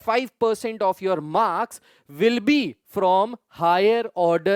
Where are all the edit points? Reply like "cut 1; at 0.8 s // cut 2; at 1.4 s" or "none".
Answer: none

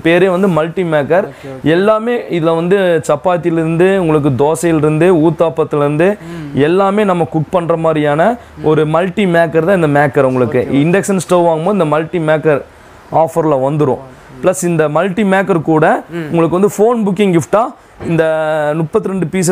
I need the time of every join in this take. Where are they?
none

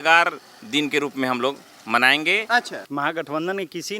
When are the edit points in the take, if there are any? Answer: cut 1; at 2.7 s

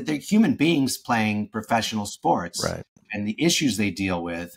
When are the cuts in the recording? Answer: none

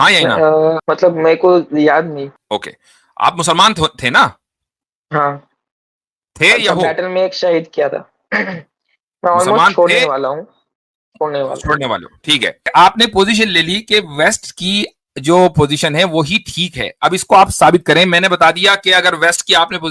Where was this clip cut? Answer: cut 1; at 0.8 s // cut 2; at 2.4 s // cut 3; at 12.7 s

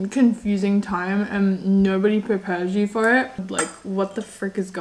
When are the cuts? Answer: cut 1; at 3.4 s

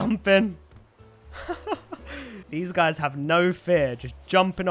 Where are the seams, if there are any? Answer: none

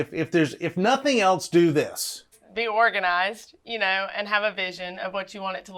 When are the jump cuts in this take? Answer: cut 1; at 2.4 s

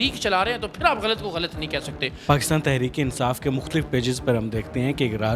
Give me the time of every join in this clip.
cut 1; at 2.1 s

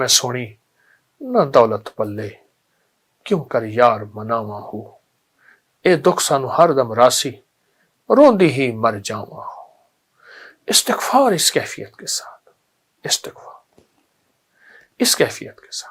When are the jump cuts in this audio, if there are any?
none

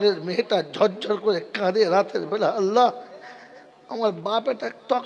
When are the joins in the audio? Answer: none

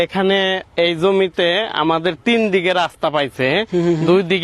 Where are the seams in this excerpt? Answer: none

